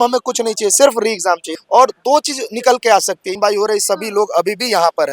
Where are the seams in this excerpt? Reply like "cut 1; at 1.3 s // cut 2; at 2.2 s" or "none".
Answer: cut 1; at 1.5 s // cut 2; at 3.3 s